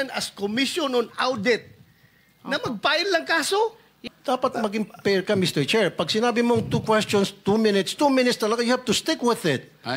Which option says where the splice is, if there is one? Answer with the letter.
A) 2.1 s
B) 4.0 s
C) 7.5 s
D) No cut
B